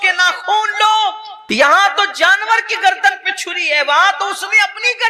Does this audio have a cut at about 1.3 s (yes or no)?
yes